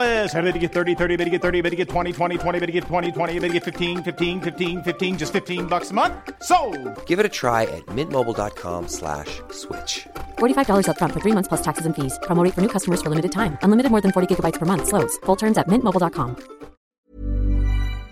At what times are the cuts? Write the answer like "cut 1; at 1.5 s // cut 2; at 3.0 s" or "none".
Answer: cut 1; at 16.9 s